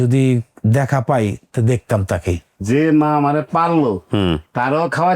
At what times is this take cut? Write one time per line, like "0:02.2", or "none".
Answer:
0:02.5

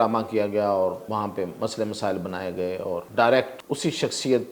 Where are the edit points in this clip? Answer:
0:01.0
0:03.1
0:03.6

